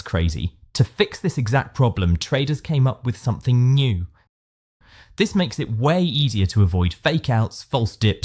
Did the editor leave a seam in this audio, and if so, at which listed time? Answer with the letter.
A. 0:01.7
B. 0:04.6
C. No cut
B